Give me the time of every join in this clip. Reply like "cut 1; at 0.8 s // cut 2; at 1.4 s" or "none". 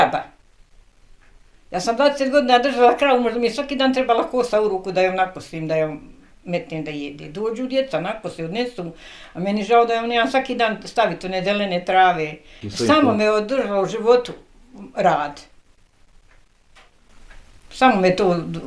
cut 1; at 12.6 s